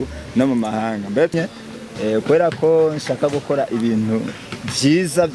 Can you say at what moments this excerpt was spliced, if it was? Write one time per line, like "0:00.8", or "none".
0:01.3